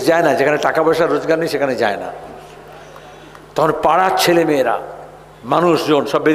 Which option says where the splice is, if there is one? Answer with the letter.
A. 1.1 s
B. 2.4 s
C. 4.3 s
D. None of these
D